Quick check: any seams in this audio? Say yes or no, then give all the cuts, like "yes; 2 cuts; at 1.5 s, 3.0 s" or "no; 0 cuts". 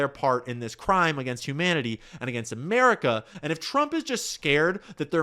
no; 0 cuts